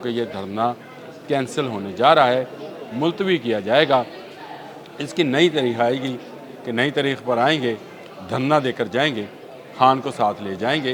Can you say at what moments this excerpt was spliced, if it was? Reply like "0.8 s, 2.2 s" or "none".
none